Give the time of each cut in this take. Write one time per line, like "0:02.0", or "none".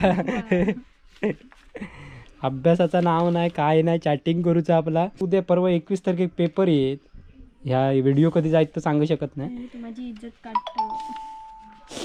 none